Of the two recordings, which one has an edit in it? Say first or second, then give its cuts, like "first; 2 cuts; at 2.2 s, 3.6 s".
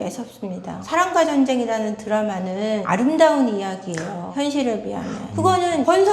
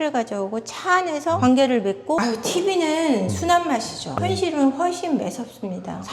second; 2 cuts; at 2.2 s, 4.2 s